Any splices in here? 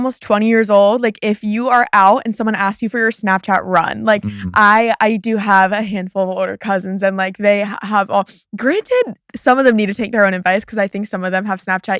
no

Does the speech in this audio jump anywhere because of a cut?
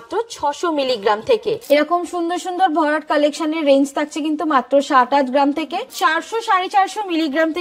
yes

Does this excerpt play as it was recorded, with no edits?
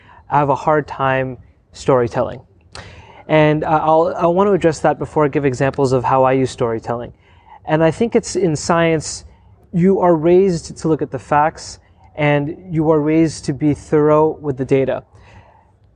yes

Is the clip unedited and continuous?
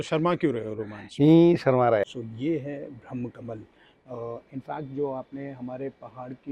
no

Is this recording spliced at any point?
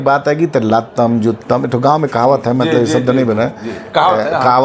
no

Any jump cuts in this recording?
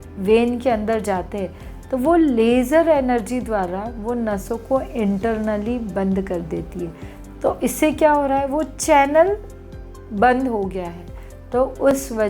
no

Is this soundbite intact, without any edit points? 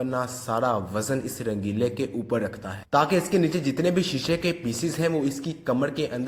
yes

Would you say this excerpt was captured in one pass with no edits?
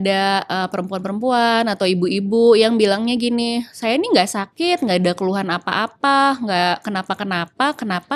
yes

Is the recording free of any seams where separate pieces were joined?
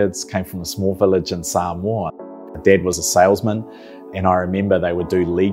no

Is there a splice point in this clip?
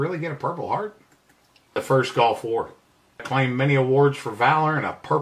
yes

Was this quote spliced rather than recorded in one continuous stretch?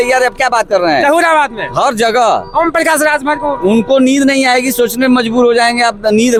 no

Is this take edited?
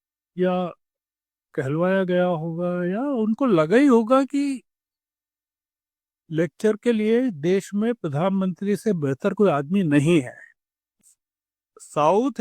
yes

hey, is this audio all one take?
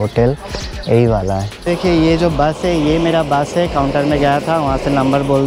no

